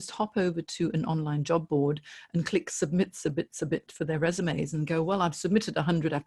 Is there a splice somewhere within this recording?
no; 0 cuts

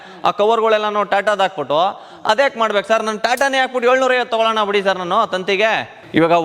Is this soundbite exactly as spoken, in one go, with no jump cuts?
yes; 0 cuts

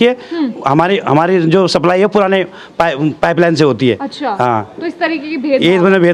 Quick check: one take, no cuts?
yes; 0 cuts

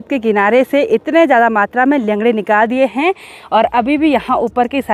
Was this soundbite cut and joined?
no; 0 cuts

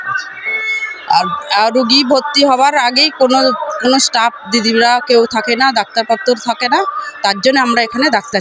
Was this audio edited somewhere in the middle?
no; 0 cuts

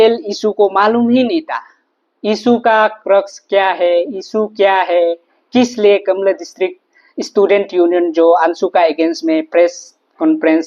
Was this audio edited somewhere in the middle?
no; 0 cuts

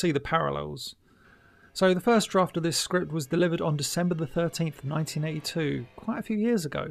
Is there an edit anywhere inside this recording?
no; 0 cuts

